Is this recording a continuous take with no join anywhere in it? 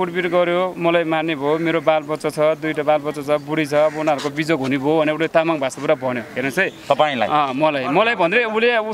yes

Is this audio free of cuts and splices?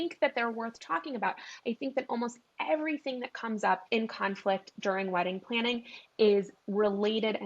no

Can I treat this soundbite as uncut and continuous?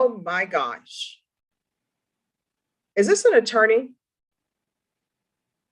yes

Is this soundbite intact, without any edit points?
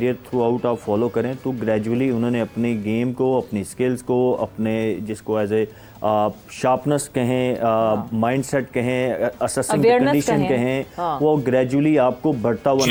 yes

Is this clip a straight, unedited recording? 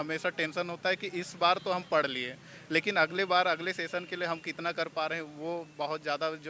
yes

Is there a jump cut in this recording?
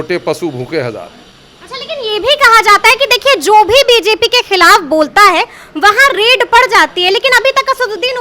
no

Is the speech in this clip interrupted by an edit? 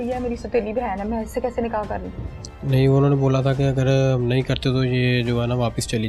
no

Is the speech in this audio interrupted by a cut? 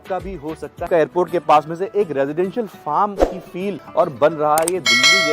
yes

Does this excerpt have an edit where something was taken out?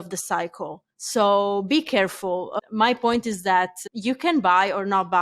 yes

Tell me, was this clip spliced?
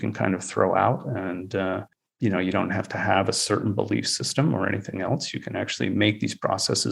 no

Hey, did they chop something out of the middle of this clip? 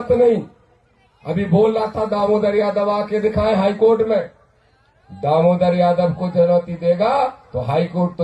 no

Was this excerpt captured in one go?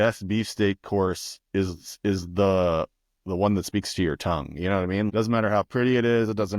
no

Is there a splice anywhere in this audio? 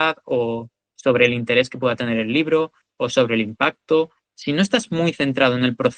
yes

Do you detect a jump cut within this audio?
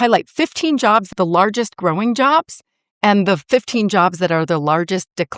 yes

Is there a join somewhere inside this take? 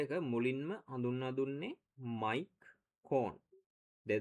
no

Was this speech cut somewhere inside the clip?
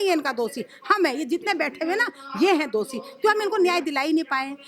no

